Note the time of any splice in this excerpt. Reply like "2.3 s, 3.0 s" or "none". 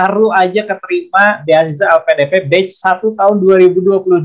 none

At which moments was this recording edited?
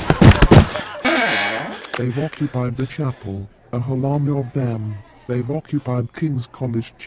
1.3 s

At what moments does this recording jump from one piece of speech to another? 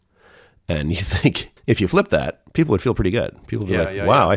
1.5 s

